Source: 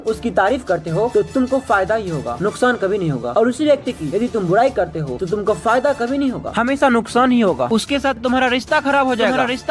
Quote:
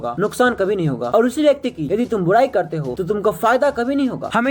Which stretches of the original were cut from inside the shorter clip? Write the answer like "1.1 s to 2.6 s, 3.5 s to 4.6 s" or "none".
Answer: none

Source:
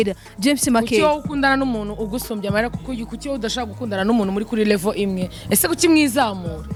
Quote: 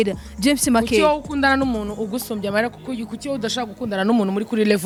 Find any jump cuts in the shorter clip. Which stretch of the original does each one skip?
none

